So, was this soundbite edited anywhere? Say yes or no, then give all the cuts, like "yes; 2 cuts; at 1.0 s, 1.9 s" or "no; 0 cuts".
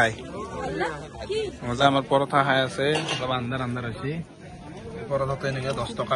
yes; 1 cut; at 1.8 s